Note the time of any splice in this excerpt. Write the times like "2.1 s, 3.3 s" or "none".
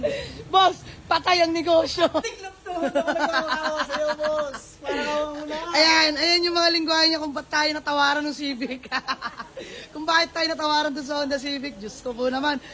2.2 s